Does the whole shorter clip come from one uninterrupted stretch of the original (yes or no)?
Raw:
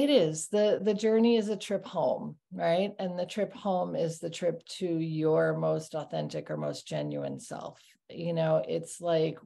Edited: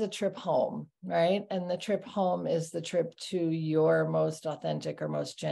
yes